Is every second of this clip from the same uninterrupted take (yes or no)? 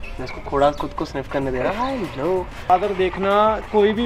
no